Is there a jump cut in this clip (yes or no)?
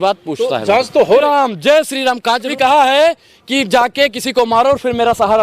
yes